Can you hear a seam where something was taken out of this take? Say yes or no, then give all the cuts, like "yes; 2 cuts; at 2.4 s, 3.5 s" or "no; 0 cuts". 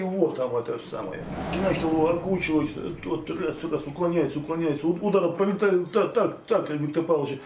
yes; 1 cut; at 1.5 s